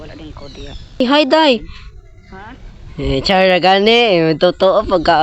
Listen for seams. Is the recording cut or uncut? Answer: cut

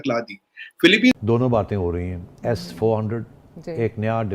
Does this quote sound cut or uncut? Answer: cut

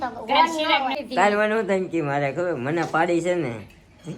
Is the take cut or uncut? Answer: cut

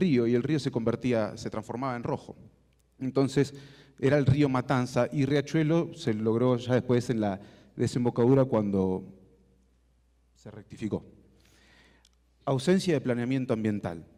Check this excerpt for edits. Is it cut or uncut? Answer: uncut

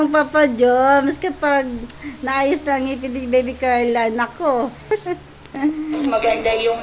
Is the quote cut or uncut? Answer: cut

